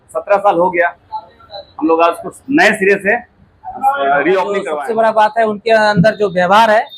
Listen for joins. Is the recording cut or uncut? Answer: cut